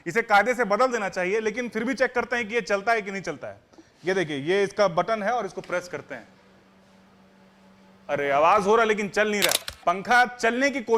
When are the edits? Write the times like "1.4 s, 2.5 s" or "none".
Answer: 9.6 s